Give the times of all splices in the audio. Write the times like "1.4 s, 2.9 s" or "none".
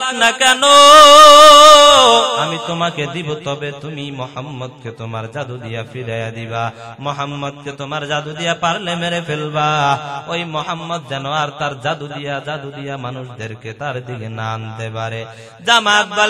2.5 s

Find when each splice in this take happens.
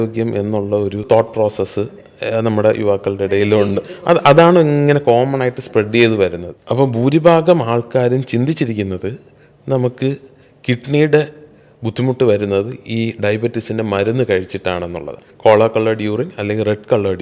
1.0 s, 6.5 s, 15.3 s

